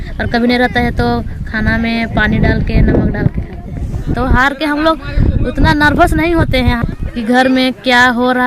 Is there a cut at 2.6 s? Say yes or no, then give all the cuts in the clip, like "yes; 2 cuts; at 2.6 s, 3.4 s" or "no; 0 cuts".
no; 2 cuts; at 4.1 s, 6.8 s